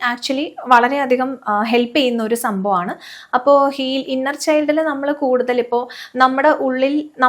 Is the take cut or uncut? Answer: uncut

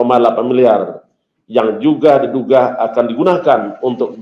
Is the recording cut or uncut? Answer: uncut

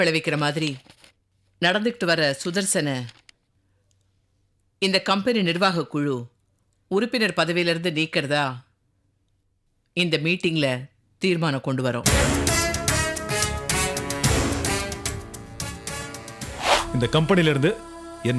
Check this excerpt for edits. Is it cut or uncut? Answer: cut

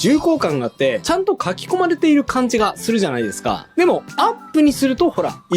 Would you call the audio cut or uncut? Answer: cut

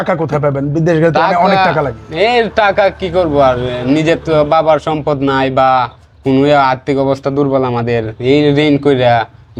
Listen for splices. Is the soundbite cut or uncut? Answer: uncut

